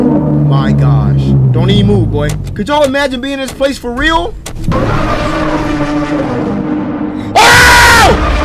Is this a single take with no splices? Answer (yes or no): yes